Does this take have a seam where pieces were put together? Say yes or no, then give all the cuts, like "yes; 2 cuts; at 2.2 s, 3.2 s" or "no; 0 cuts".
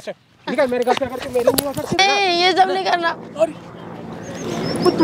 yes; 1 cut; at 2.0 s